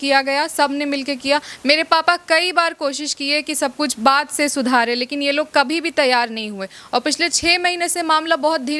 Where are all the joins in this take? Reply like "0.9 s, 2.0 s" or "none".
none